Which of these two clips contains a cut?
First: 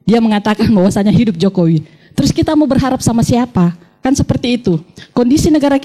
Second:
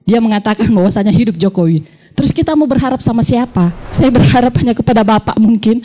second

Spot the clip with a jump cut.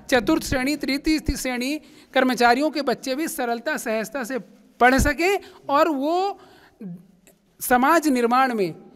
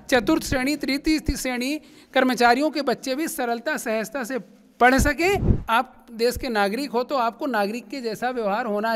second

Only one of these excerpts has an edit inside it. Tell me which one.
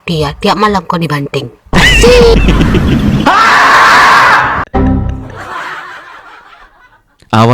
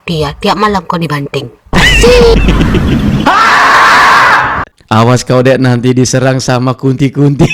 second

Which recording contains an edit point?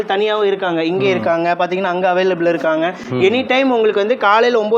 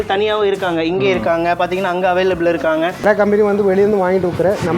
second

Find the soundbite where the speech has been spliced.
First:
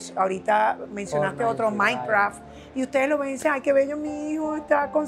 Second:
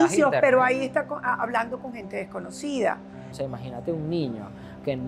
second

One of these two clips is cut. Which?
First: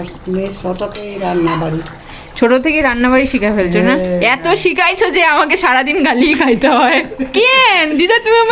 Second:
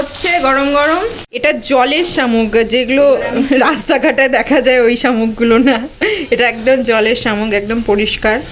second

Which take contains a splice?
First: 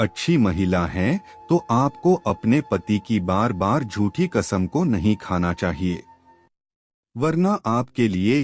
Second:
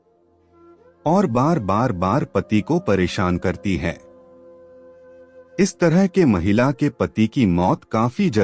second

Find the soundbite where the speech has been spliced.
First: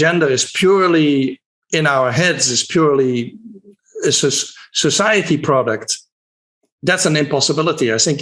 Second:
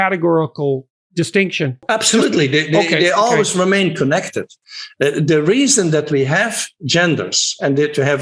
second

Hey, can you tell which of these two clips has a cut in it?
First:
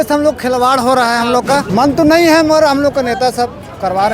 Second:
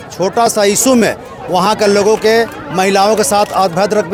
first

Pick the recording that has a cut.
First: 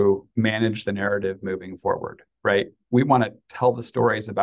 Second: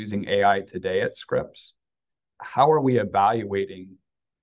second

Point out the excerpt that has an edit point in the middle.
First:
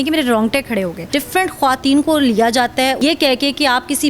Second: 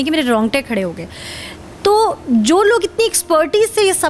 first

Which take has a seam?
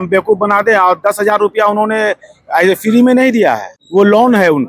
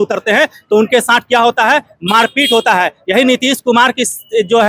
first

